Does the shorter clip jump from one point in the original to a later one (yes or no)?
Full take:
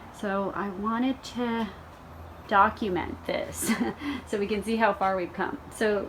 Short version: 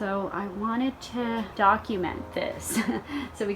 yes